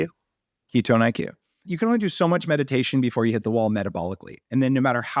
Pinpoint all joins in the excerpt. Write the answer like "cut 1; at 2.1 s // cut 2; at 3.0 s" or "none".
cut 1; at 1.7 s